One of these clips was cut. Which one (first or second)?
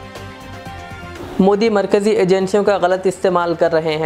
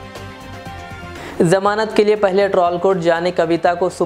first